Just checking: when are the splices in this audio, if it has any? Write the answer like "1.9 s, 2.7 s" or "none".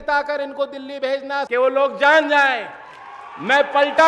1.4 s